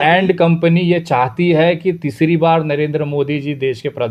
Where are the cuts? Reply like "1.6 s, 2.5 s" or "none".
none